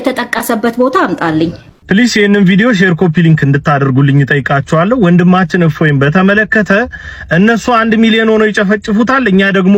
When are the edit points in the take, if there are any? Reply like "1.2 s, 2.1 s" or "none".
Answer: 1.8 s